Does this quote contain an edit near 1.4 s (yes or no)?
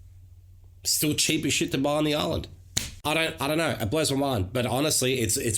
no